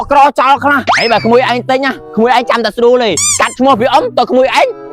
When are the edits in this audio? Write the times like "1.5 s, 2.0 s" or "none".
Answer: 0.9 s, 2.0 s, 3.2 s